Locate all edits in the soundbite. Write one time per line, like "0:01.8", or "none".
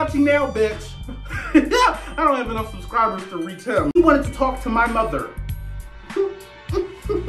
0:04.0